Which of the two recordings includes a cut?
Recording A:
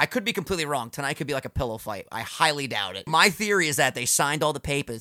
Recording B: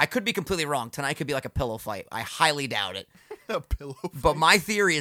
A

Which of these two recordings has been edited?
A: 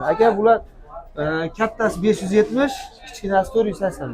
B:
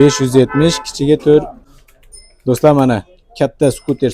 B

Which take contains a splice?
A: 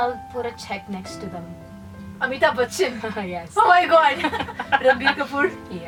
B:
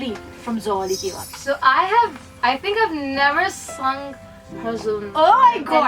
B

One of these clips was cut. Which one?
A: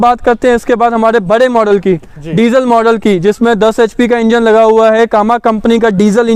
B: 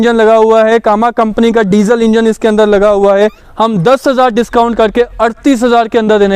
B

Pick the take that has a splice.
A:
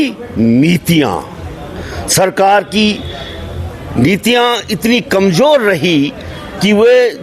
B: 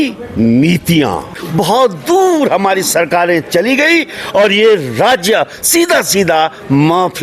B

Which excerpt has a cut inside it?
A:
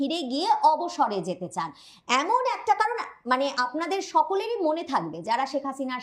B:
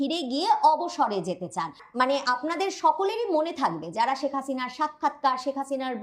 B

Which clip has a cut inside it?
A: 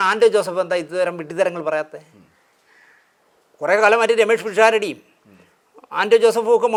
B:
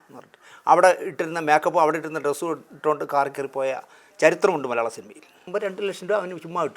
B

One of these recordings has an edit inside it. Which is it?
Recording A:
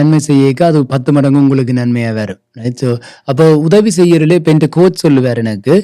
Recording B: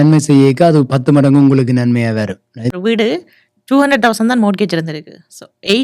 B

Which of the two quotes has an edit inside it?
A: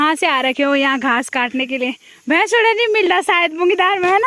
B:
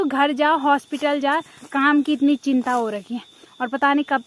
B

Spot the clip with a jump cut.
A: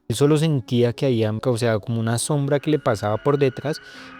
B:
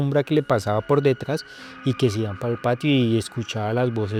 A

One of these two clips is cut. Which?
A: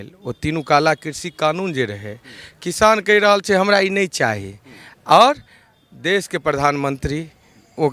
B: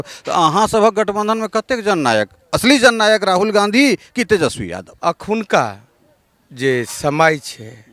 B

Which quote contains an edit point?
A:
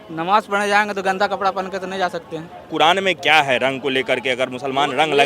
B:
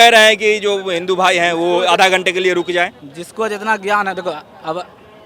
A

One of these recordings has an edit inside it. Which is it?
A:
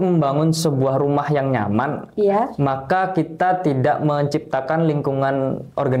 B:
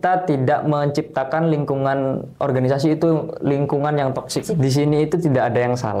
B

